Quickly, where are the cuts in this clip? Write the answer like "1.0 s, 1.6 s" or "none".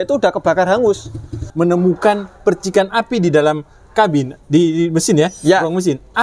1.5 s